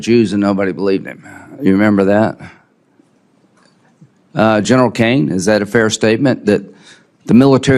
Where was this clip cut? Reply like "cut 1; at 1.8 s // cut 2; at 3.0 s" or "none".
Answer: none